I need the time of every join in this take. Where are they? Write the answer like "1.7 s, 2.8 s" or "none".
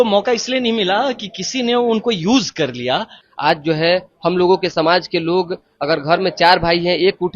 3.2 s